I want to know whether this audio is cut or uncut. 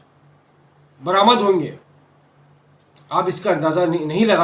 uncut